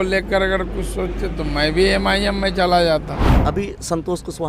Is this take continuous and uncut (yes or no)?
no